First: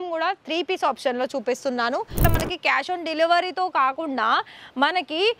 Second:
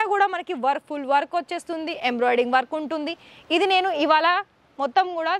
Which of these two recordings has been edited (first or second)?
first